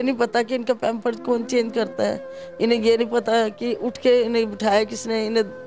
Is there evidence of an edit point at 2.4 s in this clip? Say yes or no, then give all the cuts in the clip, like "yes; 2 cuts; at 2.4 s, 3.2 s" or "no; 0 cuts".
no; 0 cuts